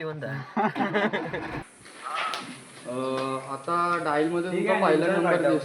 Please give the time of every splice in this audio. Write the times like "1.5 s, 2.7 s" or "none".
1.6 s

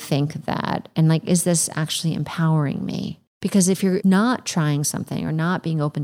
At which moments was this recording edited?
3.8 s

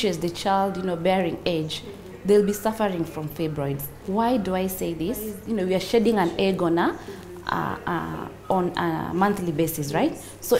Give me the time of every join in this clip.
5.4 s

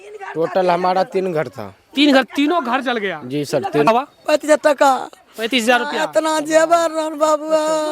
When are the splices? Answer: 3.9 s

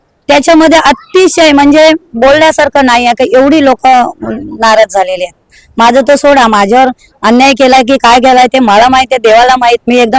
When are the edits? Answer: none

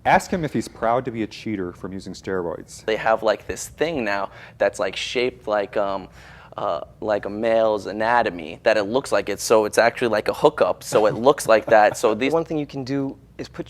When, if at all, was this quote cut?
2.9 s, 12.3 s

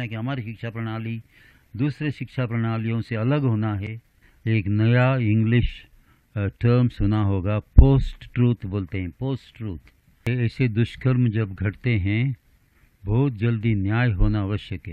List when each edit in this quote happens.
4.3 s, 10.3 s

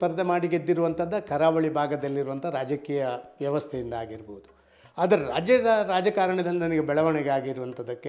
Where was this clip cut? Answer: none

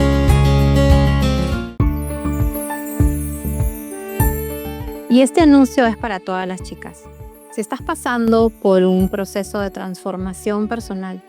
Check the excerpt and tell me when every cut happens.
1.5 s

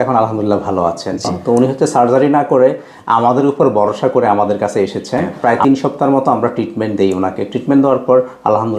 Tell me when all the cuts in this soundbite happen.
1.3 s, 5.3 s

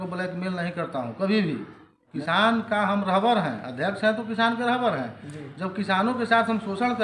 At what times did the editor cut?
2.1 s

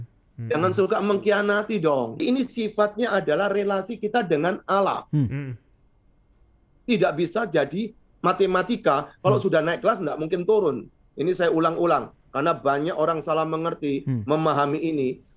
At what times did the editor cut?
2.2 s

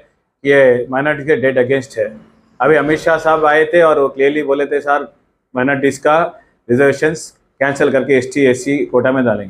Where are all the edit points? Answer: none

